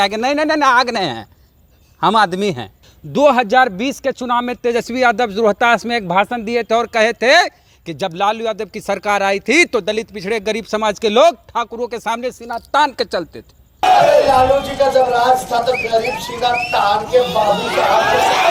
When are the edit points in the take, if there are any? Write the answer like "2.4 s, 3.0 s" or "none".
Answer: none